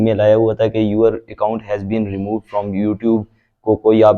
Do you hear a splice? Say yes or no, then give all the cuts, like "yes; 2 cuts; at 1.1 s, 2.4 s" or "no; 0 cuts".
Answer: no; 0 cuts